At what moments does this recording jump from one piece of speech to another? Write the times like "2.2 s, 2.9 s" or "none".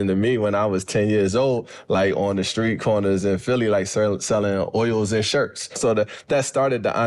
5.8 s